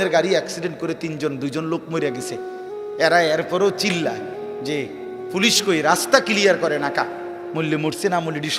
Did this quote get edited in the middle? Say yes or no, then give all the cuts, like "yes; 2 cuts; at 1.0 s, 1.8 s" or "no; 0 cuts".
no; 0 cuts